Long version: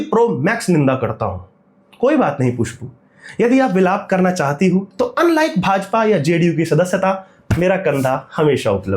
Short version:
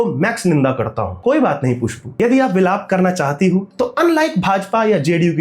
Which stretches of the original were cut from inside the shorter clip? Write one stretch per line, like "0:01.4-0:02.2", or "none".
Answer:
0:01.3-0:01.8
0:02.7-0:03.2